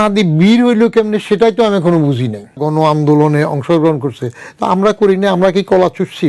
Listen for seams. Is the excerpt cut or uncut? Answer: cut